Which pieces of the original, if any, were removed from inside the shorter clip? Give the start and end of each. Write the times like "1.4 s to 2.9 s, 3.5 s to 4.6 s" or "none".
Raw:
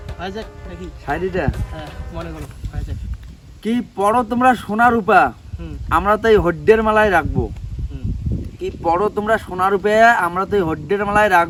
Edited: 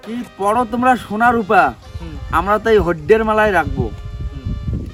none